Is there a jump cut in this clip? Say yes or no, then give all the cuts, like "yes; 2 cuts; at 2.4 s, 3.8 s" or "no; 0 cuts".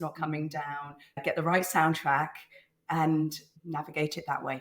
yes; 2 cuts; at 1.2 s, 3.5 s